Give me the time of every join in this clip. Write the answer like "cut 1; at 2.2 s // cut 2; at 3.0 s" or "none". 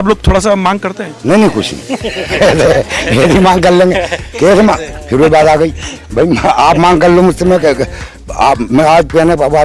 none